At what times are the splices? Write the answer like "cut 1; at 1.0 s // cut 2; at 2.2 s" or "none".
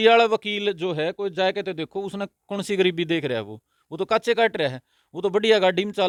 none